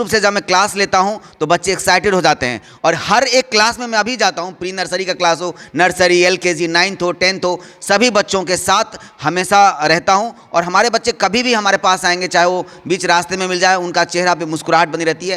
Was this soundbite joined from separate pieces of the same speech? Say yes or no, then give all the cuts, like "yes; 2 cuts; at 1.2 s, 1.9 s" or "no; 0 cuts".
no; 0 cuts